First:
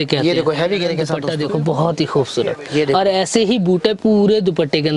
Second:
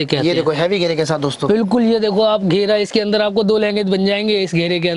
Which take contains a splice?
first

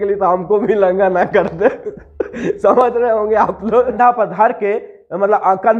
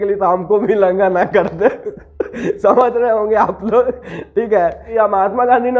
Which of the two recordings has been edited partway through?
first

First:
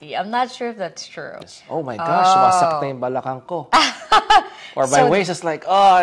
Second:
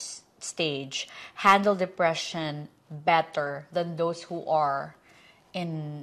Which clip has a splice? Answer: first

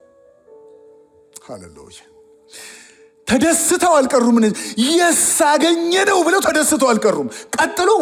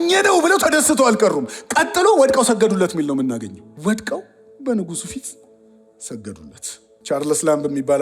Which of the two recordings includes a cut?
second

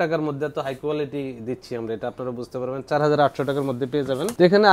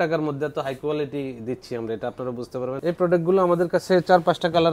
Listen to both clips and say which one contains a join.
second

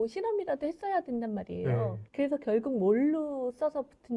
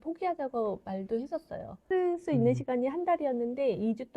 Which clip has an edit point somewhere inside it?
second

